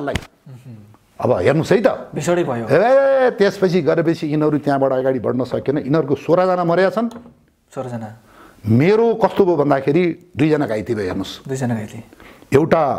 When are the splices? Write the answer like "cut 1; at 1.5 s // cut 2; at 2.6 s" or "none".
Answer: none

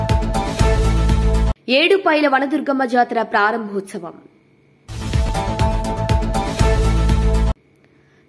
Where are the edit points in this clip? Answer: none

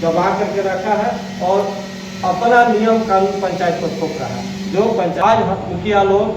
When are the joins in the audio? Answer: cut 1; at 5.2 s

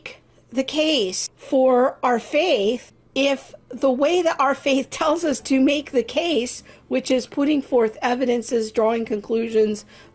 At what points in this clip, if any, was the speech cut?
cut 1; at 1.3 s // cut 2; at 3.0 s

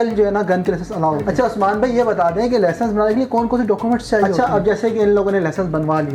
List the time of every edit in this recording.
cut 1; at 1.3 s // cut 2; at 4.3 s

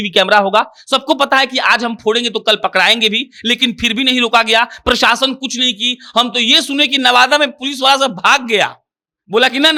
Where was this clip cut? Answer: none

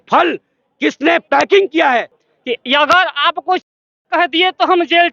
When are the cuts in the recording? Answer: cut 1; at 2.1 s

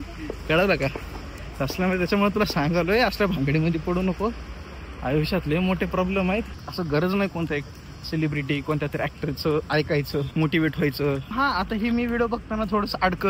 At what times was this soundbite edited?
cut 1; at 6.6 s // cut 2; at 10.3 s // cut 3; at 11.3 s

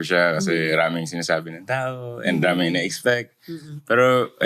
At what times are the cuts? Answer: none

